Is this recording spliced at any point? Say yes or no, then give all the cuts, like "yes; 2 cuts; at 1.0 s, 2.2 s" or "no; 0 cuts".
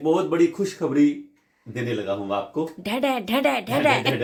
no; 0 cuts